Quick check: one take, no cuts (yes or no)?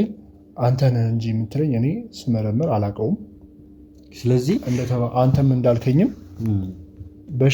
yes